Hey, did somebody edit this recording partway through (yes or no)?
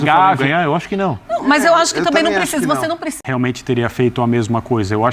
yes